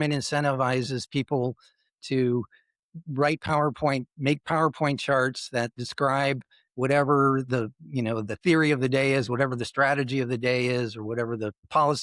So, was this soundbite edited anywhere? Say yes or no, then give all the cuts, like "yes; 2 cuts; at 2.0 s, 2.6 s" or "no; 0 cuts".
no; 0 cuts